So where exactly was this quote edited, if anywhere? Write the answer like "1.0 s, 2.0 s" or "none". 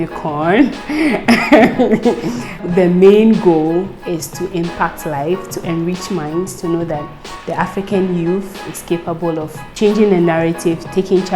2.6 s